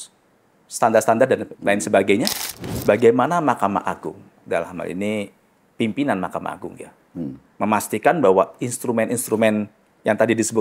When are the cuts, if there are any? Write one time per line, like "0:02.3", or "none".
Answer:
0:01.5
0:02.7